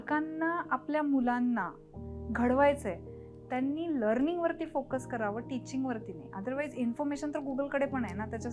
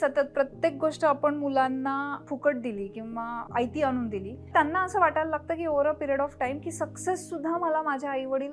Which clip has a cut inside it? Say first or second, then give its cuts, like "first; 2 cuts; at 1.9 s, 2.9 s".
second; 3 cuts; at 2.2 s, 3.4 s, 4.5 s